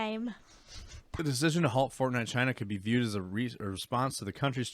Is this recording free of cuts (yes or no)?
no